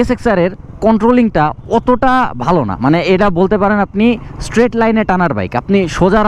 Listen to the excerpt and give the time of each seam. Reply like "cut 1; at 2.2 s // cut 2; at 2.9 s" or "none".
none